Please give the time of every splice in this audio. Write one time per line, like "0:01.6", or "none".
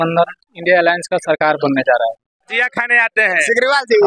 0:02.5